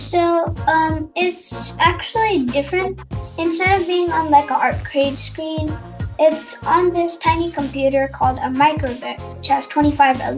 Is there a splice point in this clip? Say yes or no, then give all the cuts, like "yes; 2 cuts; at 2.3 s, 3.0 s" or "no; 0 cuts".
no; 0 cuts